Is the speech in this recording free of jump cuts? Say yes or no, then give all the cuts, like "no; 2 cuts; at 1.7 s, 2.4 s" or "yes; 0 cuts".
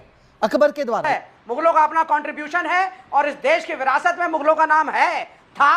no; 1 cut; at 1.0 s